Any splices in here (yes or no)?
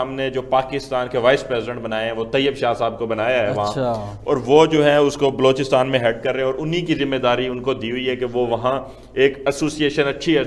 no